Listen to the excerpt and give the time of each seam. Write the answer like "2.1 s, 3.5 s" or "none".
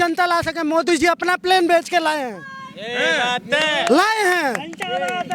none